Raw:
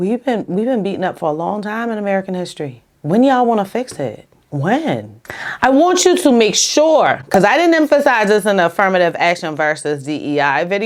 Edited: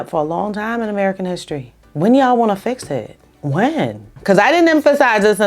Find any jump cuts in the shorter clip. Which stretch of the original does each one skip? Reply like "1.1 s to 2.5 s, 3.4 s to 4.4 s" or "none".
5.3 s to 7.2 s